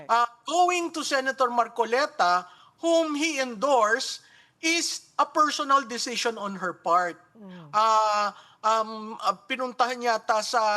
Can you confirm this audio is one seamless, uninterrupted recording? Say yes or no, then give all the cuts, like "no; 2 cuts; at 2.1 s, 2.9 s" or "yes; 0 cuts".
yes; 0 cuts